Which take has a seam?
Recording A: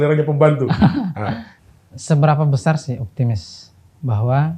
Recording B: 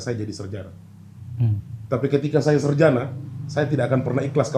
A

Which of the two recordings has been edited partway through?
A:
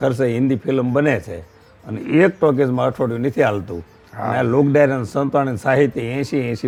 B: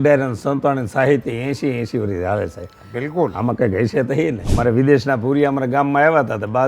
B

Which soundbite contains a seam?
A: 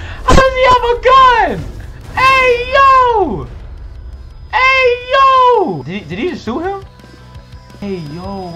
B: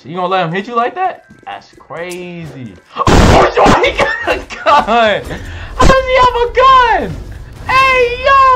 A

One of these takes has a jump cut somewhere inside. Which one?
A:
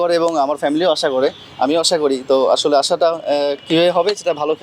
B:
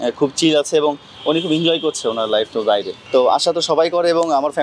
B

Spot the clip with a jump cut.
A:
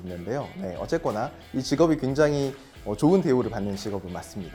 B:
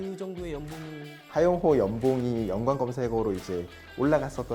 B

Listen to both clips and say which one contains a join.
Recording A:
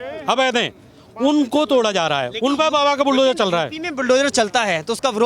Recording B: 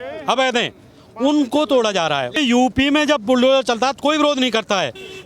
B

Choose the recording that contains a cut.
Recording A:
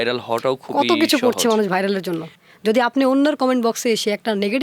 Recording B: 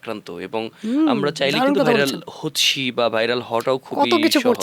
A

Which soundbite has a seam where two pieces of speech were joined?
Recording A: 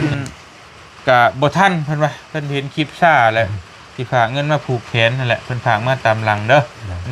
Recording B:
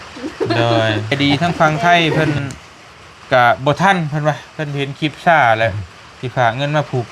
B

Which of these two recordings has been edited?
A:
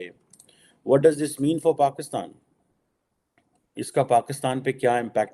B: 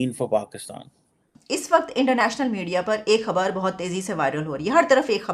B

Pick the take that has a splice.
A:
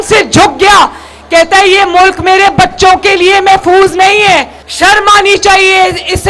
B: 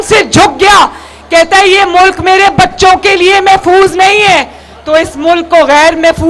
A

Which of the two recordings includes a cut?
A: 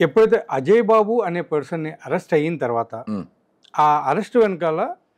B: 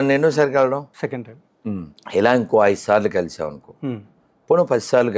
B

